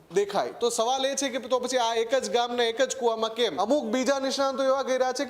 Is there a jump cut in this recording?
yes; 1 cut; at 3.5 s

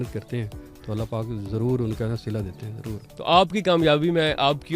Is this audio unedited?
no; 1 cut; at 3.0 s

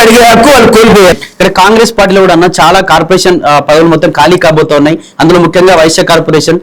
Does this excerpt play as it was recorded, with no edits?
no; 1 cut; at 1.1 s

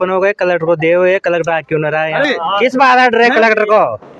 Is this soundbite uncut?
no; 1 cut; at 2.3 s

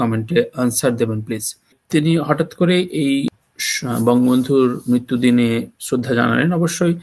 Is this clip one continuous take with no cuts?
no; 2 cuts; at 1.8 s, 3.3 s

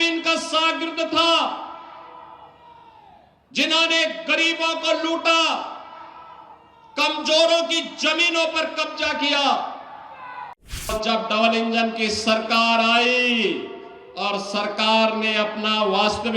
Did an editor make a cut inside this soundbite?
yes; 1 cut; at 10.9 s

